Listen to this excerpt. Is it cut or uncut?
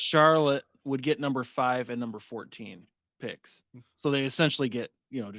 uncut